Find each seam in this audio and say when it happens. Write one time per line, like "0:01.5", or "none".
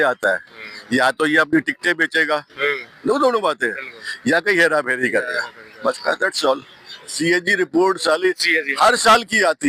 0:07.0